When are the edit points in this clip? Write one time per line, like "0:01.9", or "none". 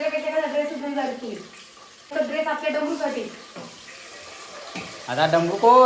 0:02.1